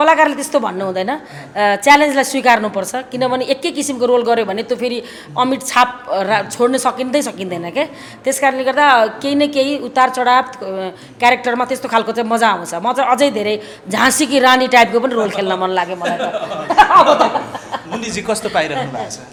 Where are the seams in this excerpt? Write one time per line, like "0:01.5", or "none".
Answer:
none